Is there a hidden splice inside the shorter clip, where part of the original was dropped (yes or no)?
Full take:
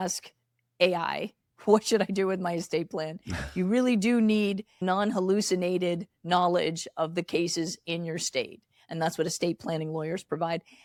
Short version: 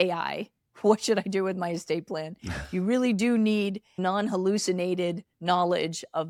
no